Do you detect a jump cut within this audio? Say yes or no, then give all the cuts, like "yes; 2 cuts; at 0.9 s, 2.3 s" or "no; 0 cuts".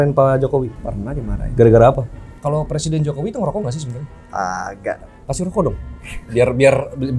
yes; 2 cuts; at 2.2 s, 5.2 s